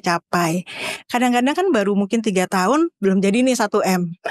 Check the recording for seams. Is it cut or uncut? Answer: cut